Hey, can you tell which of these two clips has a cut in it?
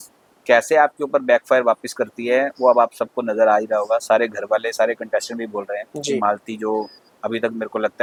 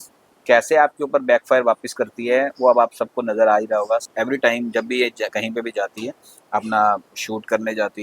second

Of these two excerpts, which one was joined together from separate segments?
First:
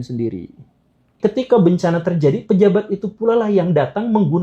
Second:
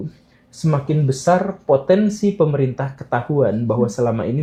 first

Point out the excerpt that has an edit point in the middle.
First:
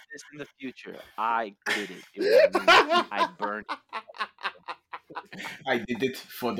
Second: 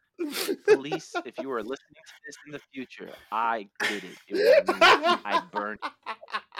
first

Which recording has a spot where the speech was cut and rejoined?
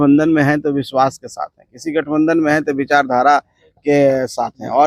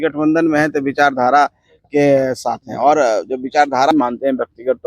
second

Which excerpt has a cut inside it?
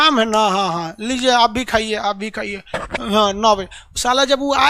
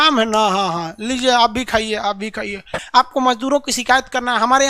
second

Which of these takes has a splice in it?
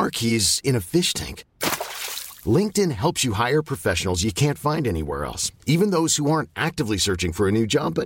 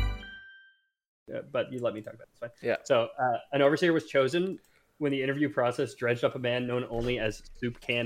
second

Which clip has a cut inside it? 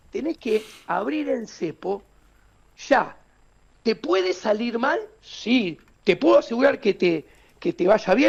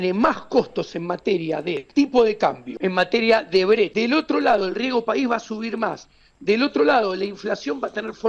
second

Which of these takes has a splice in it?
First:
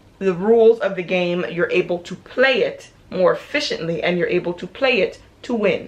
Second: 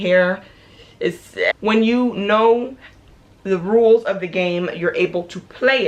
second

